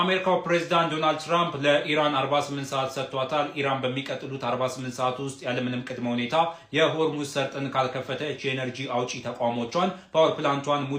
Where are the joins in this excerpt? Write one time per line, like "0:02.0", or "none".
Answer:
none